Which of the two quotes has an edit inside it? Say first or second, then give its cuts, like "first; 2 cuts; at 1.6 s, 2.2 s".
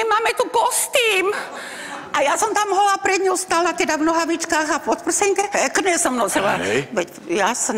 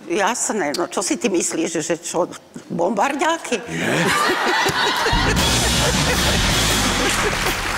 first; 1 cut; at 5.5 s